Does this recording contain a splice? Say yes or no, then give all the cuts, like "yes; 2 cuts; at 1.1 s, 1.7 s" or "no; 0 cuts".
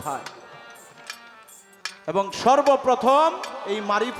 no; 0 cuts